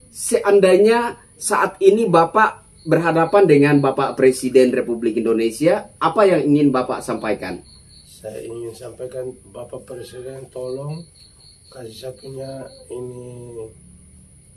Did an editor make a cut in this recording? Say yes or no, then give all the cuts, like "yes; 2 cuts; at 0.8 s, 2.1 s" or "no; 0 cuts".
no; 0 cuts